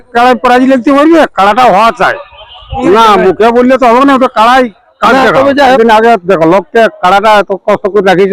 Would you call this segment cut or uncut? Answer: cut